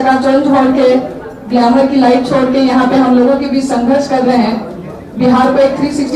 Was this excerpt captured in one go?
yes; 0 cuts

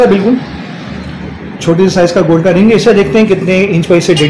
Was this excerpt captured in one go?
yes; 0 cuts

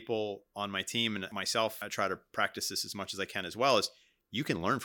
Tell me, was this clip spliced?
yes; 1 cut; at 1.7 s

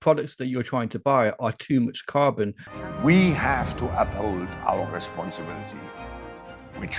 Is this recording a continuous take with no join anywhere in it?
no; 1 cut; at 2.7 s

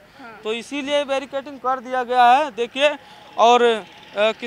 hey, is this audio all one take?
yes; 0 cuts

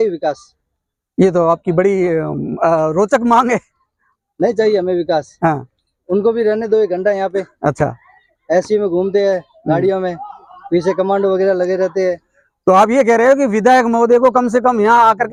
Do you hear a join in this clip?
no; 0 cuts

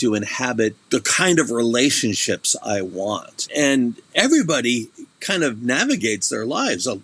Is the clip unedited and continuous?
no; 2 cuts; at 0.8 s, 3.5 s

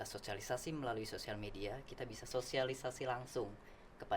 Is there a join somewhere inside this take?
yes; 1 cut; at 2.2 s

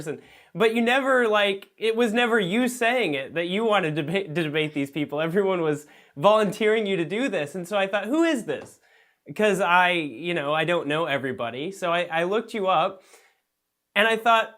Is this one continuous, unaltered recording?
no; 1 cut; at 6.7 s

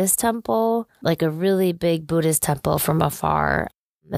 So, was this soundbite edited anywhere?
yes; 1 cut; at 0.9 s

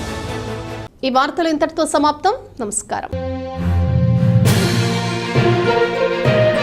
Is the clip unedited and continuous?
yes; 0 cuts

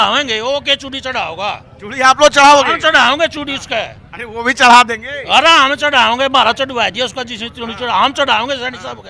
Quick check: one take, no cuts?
yes; 0 cuts

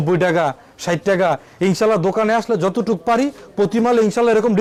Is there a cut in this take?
no; 0 cuts

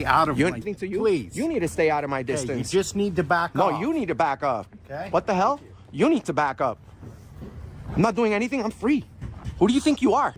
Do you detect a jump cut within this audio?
no; 0 cuts

